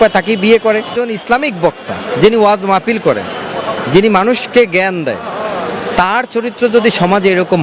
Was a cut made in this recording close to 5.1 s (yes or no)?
no